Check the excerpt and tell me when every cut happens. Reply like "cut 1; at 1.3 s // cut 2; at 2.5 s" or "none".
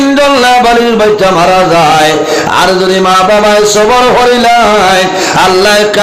none